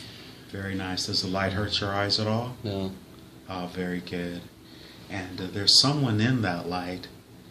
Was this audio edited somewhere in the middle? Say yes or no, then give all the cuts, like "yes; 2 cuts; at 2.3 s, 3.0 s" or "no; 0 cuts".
yes; 1 cut; at 1.6 s